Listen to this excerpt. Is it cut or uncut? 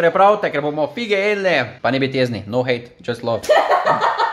cut